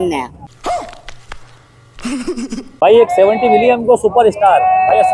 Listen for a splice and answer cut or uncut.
cut